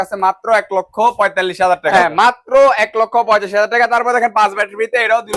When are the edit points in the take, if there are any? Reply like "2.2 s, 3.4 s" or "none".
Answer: 1.9 s

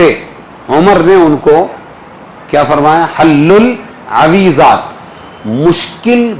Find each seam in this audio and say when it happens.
3.1 s

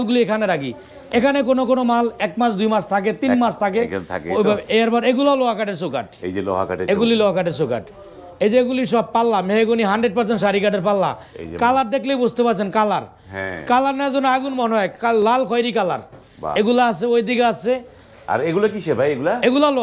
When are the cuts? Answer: none

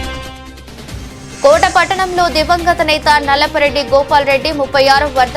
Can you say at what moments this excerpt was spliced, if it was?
1.4 s

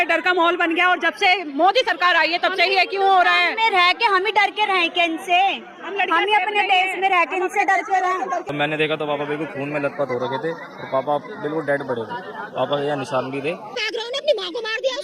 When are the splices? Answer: 8.4 s, 13.7 s

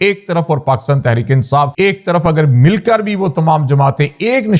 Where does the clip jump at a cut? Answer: 1.7 s

